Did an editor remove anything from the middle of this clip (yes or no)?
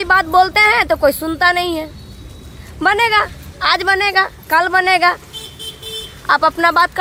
no